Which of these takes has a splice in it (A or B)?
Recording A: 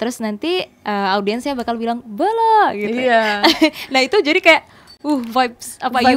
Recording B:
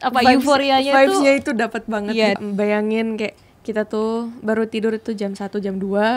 B